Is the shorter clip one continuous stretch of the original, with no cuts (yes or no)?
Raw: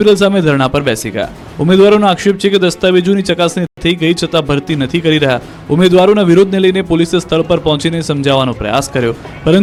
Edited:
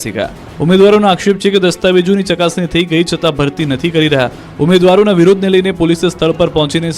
no